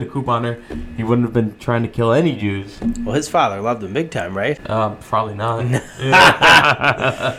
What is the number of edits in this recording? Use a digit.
1